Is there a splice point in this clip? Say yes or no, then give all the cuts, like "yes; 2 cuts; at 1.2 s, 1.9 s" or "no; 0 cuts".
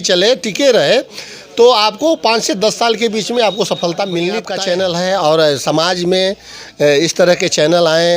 yes; 1 cut; at 4.5 s